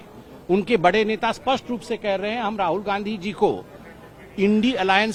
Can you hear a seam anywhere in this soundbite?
no; 0 cuts

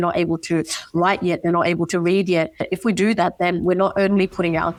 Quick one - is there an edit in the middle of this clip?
no; 0 cuts

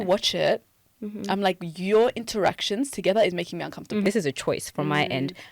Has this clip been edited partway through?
yes; 1 cut; at 4.0 s

